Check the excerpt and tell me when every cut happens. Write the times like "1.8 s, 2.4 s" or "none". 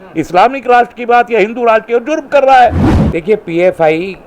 2.9 s